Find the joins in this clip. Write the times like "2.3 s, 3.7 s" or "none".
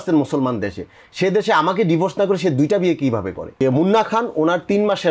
3.6 s